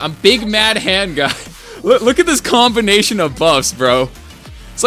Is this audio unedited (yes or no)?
yes